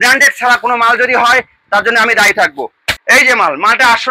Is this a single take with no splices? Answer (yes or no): no